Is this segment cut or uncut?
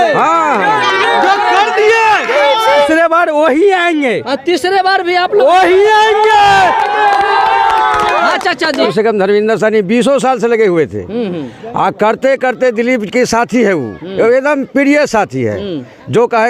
cut